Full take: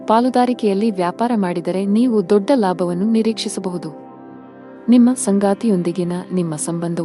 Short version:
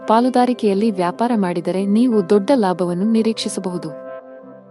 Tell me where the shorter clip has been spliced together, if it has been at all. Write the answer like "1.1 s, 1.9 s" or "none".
none

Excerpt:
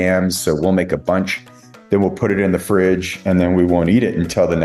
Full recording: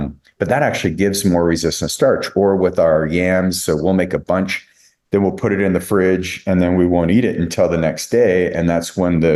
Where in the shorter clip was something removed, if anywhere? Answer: none

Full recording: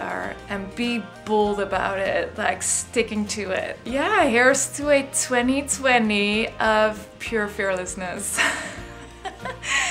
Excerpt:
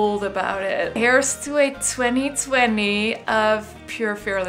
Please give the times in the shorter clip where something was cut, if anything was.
1.0 s

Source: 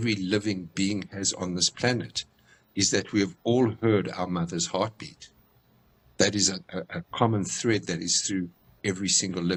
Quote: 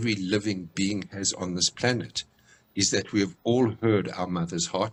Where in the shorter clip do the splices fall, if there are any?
none

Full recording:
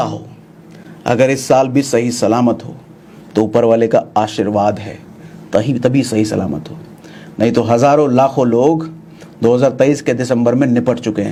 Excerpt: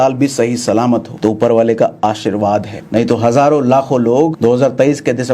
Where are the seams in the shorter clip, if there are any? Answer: 1.1 s, 2.8 s, 4.3 s

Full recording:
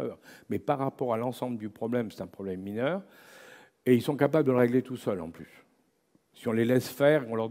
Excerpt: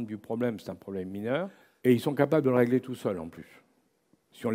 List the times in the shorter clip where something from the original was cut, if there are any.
1.6 s

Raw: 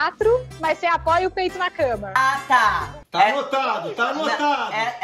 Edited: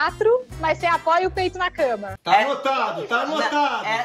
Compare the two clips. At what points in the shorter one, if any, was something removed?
2.1 s

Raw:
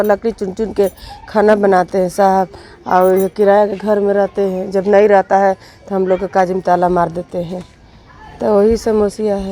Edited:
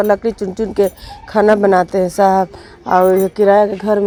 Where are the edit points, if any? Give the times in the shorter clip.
none

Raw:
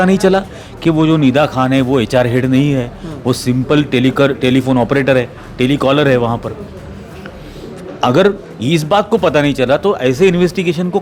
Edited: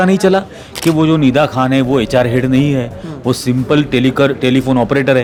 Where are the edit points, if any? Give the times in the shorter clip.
none

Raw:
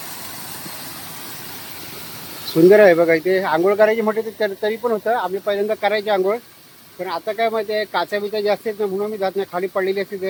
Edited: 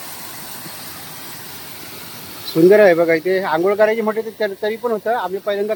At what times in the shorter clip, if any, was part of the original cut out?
none

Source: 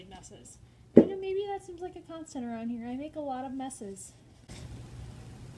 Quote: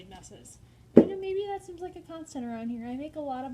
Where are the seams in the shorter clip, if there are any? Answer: none

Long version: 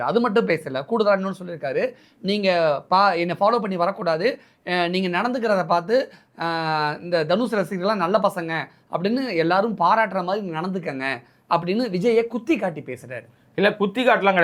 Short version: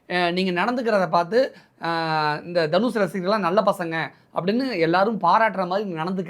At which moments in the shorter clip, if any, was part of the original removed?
none

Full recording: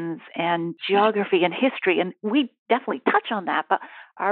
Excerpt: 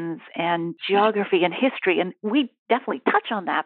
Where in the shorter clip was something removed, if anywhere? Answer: none

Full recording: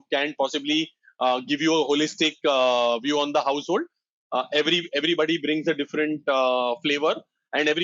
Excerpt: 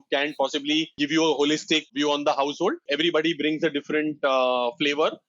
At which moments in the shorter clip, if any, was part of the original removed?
0.9 s, 1.9 s, 2.8 s

